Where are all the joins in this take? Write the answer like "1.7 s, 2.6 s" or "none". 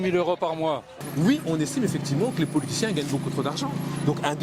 1.0 s